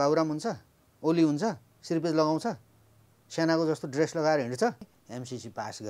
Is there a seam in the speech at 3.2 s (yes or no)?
no